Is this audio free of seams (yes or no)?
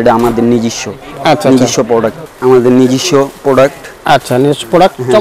no